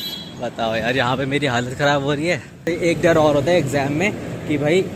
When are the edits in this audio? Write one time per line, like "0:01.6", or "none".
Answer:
0:02.7

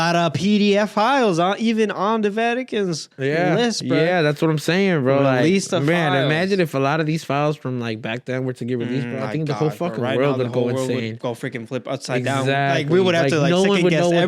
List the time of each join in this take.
none

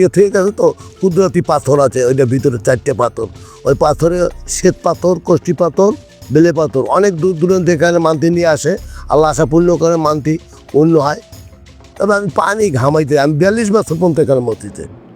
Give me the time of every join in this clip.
0:11.8

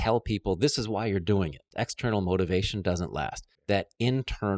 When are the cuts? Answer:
0:01.6
0:03.5

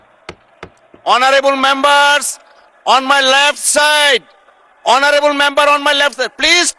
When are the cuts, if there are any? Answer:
none

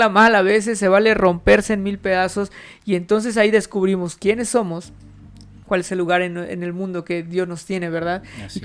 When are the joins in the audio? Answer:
none

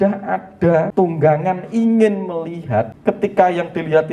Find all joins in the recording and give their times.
0:00.9
0:02.9

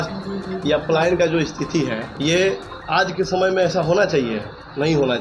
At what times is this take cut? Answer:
0:02.1

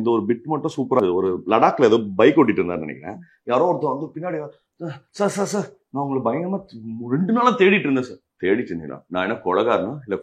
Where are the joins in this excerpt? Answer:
0:01.0

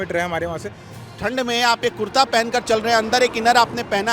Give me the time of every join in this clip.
0:01.1

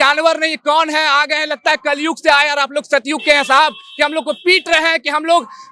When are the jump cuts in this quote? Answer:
none

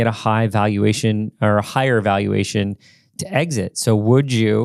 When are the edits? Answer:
none

